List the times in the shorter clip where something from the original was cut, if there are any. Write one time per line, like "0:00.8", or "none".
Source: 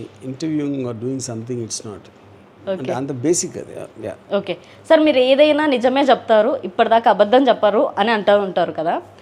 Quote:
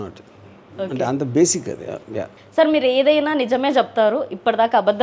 0:02.3